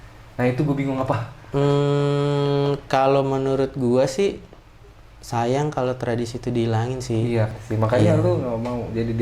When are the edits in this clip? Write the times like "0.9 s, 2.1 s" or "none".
7.5 s